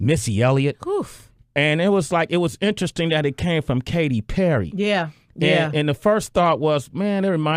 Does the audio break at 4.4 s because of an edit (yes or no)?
no